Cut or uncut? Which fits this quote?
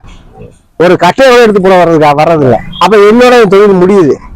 cut